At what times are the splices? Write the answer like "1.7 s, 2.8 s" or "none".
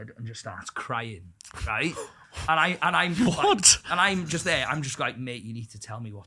none